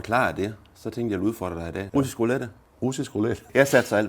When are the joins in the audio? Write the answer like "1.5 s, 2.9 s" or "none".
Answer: 1.9 s, 2.8 s

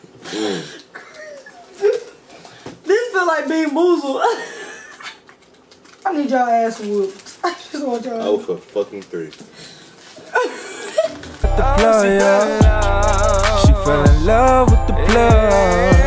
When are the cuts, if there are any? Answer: 6.1 s, 11.3 s, 13.1 s

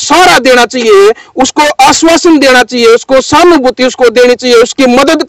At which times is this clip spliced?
none

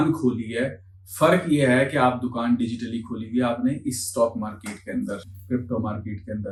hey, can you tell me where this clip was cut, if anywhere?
none

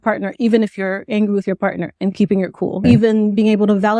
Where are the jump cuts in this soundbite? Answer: 2.8 s

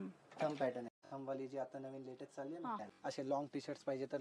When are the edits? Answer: 0.9 s, 2.9 s

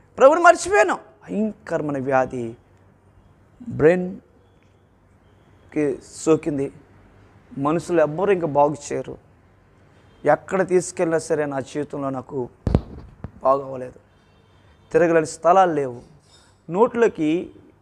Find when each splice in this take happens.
1.1 s

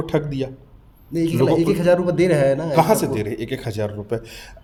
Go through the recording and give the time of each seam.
none

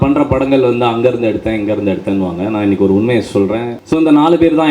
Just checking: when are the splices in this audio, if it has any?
3.8 s

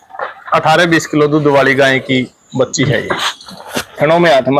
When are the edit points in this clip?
3.2 s

